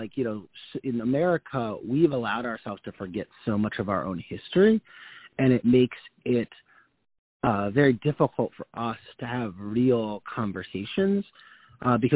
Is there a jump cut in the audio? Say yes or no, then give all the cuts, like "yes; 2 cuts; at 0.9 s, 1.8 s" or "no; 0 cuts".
no; 0 cuts